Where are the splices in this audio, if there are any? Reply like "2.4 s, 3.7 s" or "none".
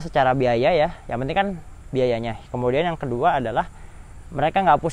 none